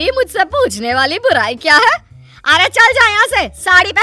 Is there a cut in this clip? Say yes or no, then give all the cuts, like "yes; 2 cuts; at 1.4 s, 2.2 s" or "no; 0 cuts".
no; 0 cuts